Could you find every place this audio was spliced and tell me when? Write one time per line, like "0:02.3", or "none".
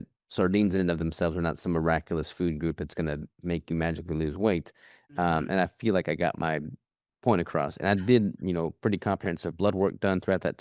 none